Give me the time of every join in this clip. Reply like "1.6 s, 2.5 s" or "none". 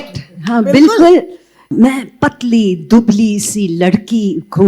1.7 s